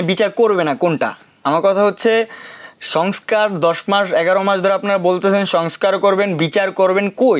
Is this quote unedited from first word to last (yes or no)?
yes